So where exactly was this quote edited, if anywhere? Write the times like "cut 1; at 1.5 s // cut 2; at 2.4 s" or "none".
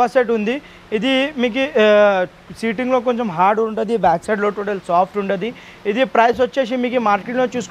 none